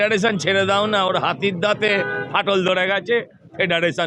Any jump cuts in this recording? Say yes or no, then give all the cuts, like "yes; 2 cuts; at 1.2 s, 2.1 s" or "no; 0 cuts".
no; 0 cuts